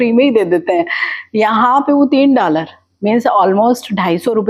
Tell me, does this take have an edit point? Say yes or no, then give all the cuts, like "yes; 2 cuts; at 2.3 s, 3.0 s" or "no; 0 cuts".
no; 0 cuts